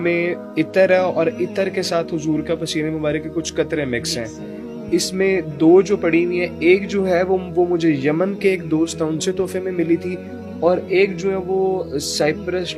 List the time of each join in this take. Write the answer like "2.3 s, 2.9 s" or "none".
none